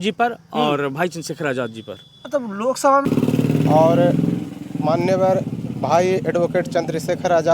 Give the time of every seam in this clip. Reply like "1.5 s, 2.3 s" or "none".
3.1 s